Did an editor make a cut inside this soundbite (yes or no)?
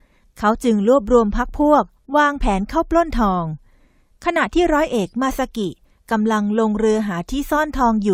yes